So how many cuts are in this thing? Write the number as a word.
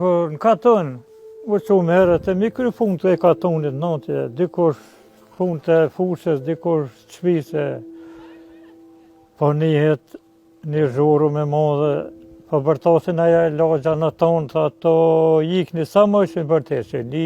zero